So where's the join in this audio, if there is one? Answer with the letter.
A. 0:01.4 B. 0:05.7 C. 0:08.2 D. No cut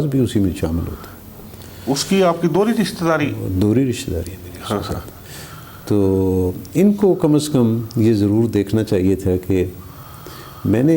D